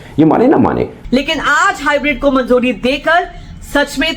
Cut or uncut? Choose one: cut